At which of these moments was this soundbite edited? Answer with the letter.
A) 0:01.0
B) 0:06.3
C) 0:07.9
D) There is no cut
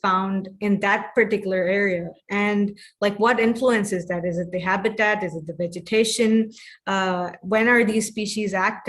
D